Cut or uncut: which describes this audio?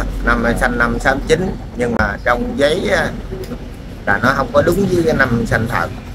uncut